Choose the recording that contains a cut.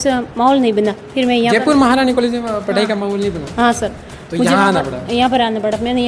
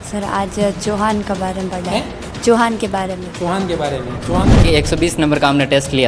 second; 1 cut; at 4.6 s

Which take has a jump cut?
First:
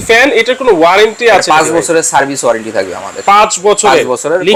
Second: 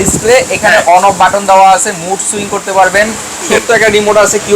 second; 1 cut; at 3.5 s

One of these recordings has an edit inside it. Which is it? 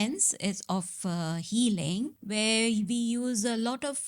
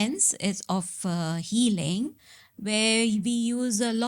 first; 1 cut; at 2.2 s

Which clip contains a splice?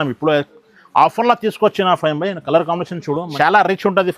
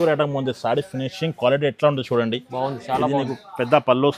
first; 1 cut; at 3.3 s

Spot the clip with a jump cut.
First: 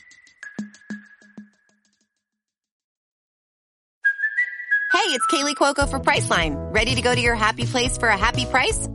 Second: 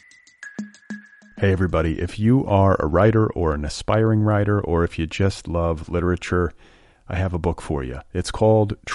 second; 1 cut; at 0.9 s

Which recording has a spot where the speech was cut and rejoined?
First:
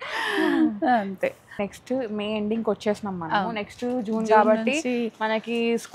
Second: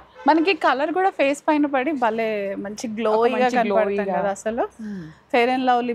first; 1 cut; at 1.6 s

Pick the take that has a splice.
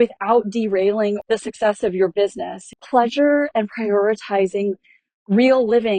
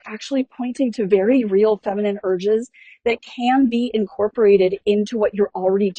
first; 1 cut; at 1.2 s

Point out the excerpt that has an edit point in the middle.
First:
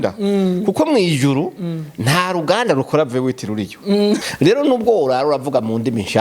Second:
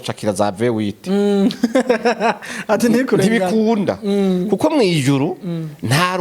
first; 1 cut; at 4.2 s

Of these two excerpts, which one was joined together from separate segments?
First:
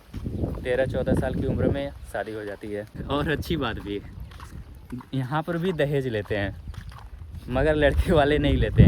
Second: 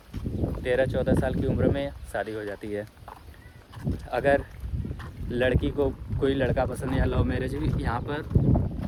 first; 1 cut; at 3.0 s

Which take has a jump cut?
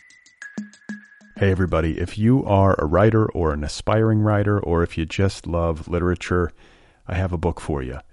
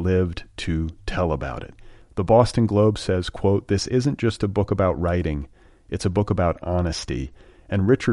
first; 1 cut; at 0.9 s

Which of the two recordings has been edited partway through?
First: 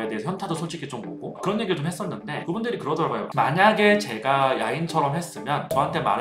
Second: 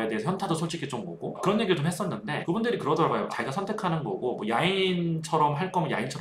first; 1 cut; at 3.3 s

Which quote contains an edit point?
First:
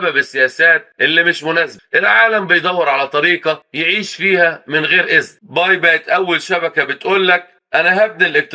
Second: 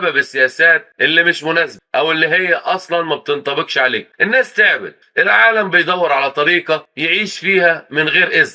first; 2 cuts; at 1.8 s, 5.4 s

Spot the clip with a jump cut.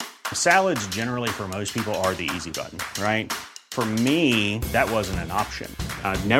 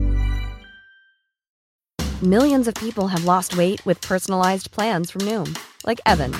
second; 1 cut; at 1.5 s

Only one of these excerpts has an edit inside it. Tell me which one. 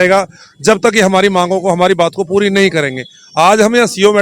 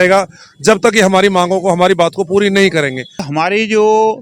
second; 1 cut; at 3.2 s

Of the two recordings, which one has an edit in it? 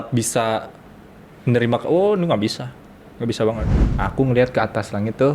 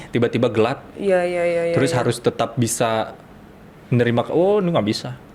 first; 1 cut; at 3.8 s

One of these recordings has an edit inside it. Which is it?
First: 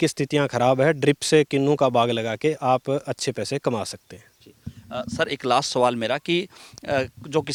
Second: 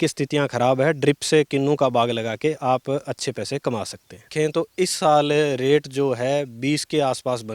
second; 1 cut; at 4.3 s

